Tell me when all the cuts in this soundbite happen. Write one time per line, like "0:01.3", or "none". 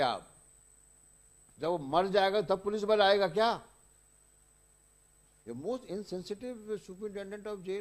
0:05.4